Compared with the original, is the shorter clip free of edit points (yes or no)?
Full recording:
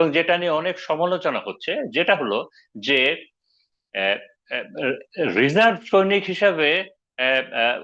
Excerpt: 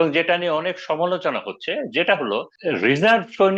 no